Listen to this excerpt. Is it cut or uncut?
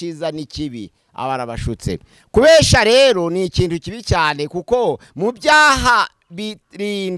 cut